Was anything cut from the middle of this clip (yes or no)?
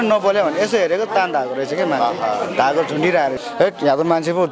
yes